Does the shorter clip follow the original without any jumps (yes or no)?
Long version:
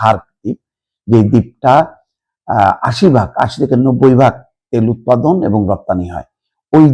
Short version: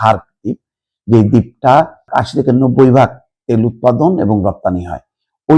no